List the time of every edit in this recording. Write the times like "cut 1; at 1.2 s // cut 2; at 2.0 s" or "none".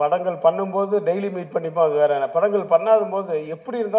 none